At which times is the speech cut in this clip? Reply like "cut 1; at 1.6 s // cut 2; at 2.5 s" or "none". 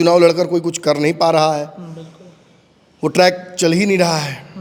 none